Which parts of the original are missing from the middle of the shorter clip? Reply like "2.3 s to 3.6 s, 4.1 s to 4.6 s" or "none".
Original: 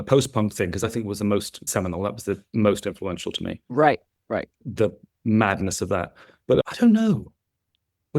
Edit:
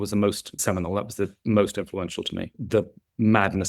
3.6 s to 4.6 s